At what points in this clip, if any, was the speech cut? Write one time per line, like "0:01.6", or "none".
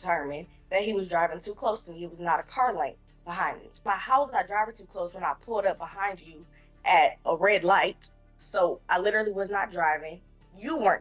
0:03.9